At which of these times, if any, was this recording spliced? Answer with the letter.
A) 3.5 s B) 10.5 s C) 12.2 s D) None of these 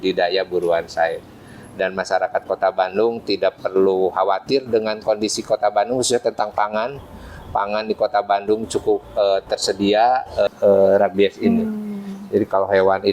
B